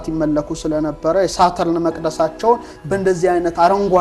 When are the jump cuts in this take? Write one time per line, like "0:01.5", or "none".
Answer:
none